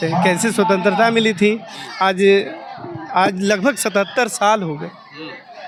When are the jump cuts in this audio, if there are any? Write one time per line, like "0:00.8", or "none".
none